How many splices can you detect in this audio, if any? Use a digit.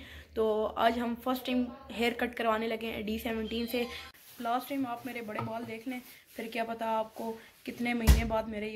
1